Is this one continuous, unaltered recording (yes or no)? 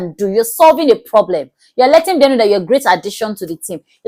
yes